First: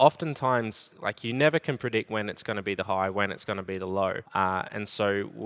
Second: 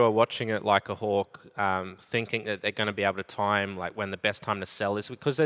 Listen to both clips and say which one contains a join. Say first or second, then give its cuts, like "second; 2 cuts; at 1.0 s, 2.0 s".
first; 1 cut; at 4.2 s